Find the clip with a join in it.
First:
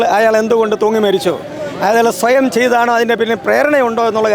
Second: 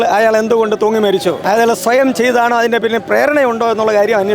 second; 1 cut; at 1.4 s

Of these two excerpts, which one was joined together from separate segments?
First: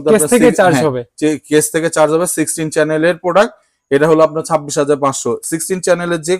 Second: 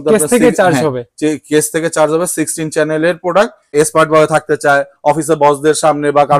second; 1 cut; at 3.7 s

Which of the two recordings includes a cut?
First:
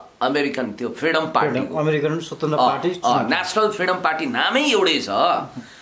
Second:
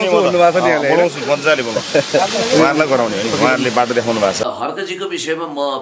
second; 1 cut; at 4.5 s

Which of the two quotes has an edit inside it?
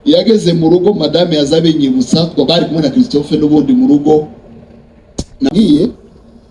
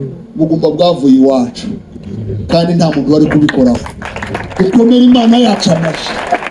first; 1 cut; at 5.5 s

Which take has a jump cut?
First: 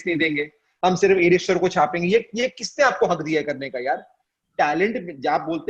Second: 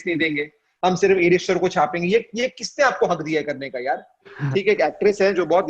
second; 1 cut; at 4.4 s

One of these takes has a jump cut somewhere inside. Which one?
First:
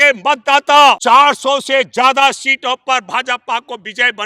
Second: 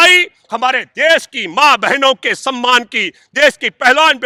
first; 1 cut; at 1.0 s

